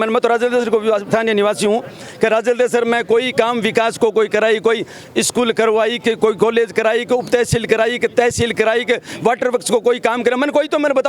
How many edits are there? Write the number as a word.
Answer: zero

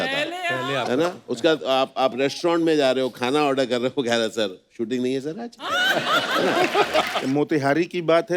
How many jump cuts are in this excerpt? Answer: one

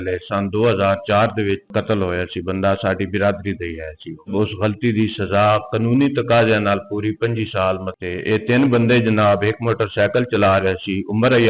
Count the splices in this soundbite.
three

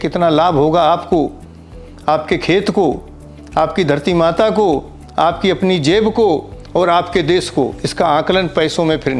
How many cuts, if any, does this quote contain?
zero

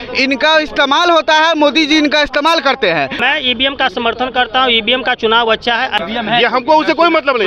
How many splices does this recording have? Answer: two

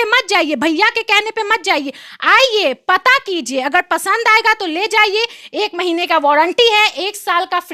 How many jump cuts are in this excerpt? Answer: zero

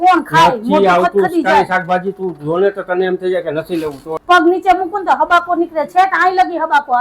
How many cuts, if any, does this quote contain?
one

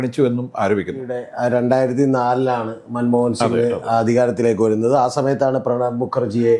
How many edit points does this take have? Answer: one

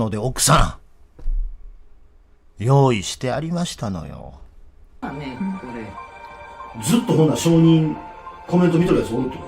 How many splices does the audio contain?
one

